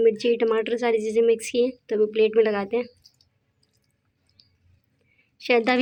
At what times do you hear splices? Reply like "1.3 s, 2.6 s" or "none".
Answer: none